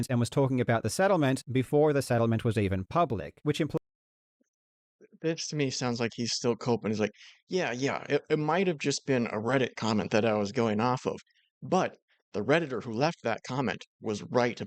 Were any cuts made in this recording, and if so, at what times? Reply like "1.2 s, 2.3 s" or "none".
none